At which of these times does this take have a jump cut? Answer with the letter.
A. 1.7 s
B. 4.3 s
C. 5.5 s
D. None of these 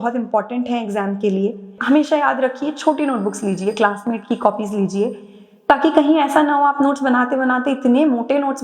A